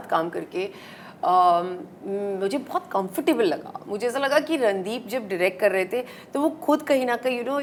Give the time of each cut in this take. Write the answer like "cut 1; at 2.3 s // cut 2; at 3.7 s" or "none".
none